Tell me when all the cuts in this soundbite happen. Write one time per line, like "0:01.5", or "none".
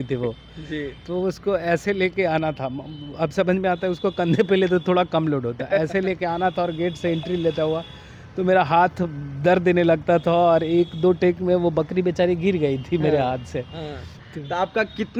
0:14.2